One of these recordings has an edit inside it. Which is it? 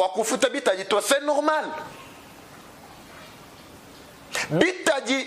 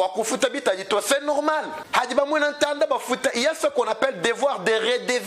second; 1 cut; at 1.8 s

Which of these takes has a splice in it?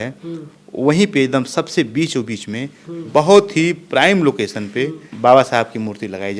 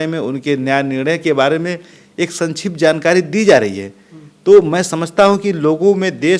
first; 1 cut; at 5.1 s

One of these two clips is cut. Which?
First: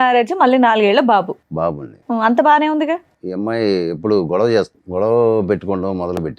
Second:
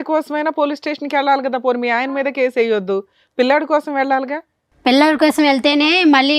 first; 2 cuts; at 3.2 s, 4.8 s

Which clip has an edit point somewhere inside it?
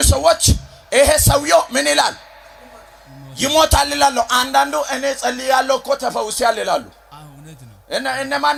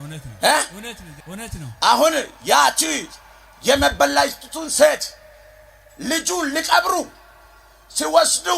second; 1 cut; at 1.2 s

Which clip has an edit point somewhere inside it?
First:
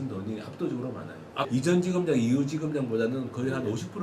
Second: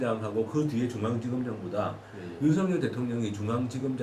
first; 1 cut; at 1.4 s

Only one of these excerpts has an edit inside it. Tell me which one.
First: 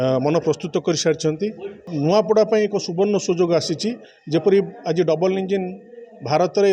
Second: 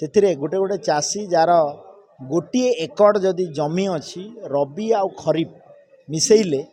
first; 1 cut; at 1.8 s

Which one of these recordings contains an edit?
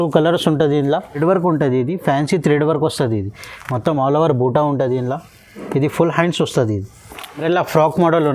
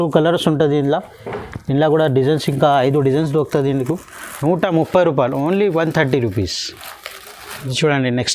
first; 2 cuts; at 1.2 s, 7.4 s

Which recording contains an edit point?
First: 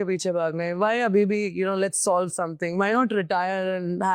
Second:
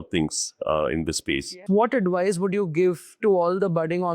second; 1 cut; at 1.6 s

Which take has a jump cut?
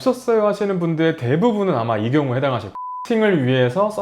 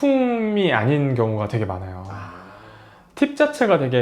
first; 1 cut; at 2.8 s

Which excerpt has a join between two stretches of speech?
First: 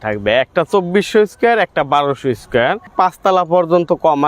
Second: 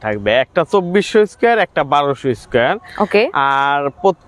first; 1 cut; at 2.9 s

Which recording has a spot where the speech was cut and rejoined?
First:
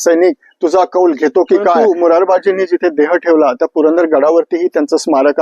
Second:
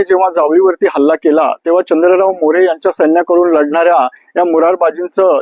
first; 1 cut; at 1.8 s

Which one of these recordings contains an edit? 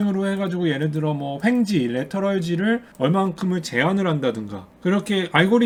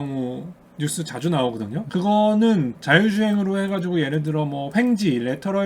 second; 1 cut; at 1.9 s

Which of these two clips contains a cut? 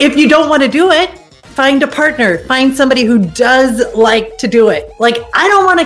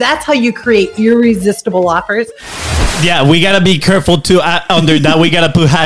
second; 1 cut; at 2.7 s

